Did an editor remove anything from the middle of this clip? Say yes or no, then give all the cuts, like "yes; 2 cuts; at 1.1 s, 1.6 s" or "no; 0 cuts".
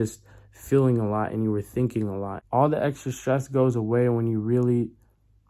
yes; 1 cut; at 2.4 s